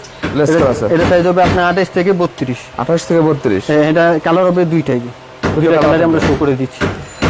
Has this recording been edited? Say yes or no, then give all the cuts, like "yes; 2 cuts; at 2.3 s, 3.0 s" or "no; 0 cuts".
no; 0 cuts